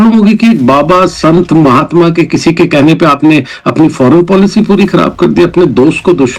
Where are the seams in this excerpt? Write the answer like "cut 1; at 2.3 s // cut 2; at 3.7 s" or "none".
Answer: none